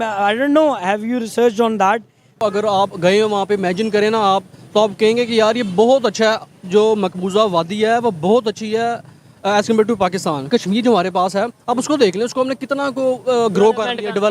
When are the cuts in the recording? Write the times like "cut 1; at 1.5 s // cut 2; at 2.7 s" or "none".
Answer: cut 1; at 2.4 s // cut 2; at 10.5 s